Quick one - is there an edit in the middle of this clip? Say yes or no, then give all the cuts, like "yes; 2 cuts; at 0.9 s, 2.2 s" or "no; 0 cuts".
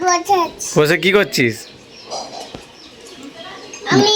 no; 0 cuts